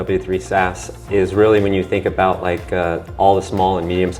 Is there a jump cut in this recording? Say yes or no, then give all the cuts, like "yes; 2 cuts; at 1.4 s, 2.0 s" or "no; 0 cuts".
no; 0 cuts